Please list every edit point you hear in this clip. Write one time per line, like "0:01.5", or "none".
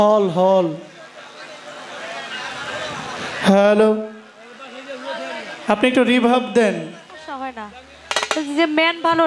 0:07.6